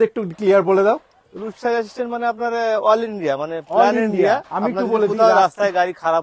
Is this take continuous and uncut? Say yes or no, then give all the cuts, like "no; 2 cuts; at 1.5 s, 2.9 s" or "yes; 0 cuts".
yes; 0 cuts